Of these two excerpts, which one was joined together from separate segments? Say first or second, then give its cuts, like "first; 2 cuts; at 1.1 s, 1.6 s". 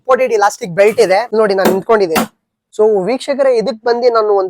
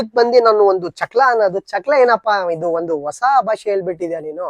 first; 2 cuts; at 1.3 s, 2.7 s